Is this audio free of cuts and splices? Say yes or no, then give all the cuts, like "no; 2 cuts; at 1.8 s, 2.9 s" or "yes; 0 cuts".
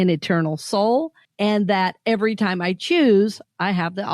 no; 1 cut; at 1.2 s